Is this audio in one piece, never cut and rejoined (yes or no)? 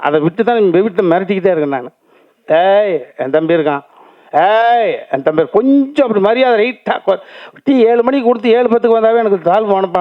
yes